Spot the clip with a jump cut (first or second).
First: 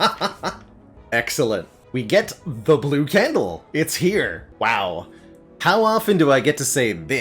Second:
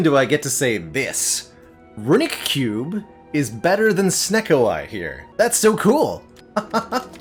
first